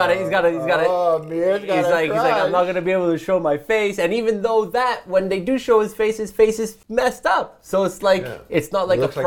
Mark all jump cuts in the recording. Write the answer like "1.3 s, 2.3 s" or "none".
6.8 s